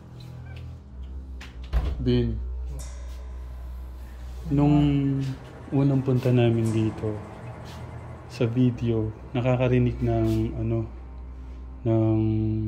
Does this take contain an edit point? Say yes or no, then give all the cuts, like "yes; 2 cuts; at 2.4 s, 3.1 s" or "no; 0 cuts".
no; 0 cuts